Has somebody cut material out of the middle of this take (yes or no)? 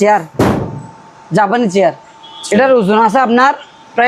no